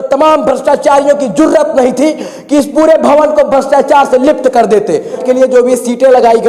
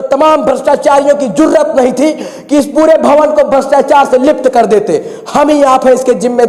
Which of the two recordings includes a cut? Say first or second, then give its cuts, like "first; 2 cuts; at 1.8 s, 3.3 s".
first; 1 cut; at 5.2 s